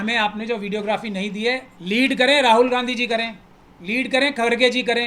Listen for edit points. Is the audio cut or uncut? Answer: cut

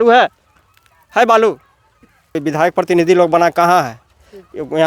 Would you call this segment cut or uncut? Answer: cut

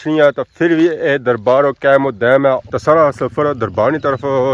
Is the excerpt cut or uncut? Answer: cut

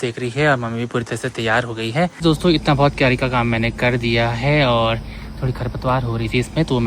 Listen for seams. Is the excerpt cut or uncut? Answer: cut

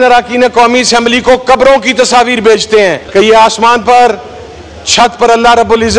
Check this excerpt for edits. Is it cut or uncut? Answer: cut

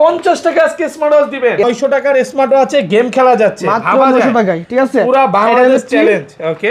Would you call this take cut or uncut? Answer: cut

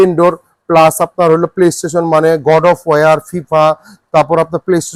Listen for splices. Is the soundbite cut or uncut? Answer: uncut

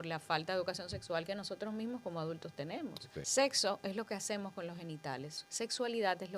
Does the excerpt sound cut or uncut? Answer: cut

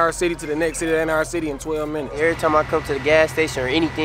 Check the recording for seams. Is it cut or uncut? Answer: cut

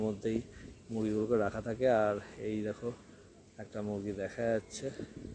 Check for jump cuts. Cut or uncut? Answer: uncut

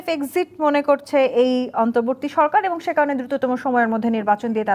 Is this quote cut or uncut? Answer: uncut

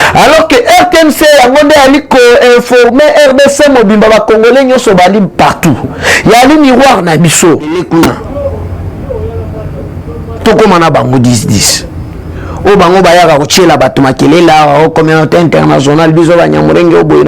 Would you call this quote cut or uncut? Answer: cut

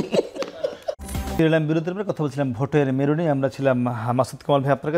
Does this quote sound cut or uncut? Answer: uncut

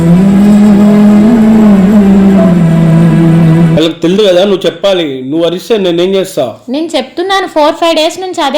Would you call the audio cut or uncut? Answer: cut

